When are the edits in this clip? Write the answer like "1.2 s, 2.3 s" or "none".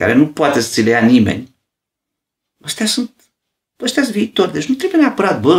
none